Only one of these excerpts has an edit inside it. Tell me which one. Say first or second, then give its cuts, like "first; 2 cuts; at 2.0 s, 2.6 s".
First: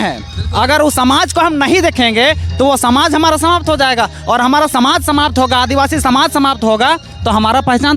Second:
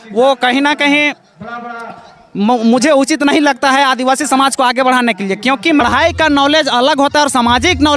second; 1 cut; at 5.8 s